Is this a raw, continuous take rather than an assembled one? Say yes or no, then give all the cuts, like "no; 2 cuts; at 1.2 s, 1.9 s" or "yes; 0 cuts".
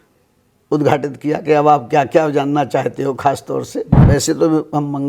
no; 1 cut; at 3.9 s